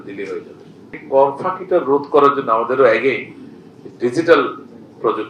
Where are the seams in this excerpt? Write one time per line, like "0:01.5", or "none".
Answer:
0:00.9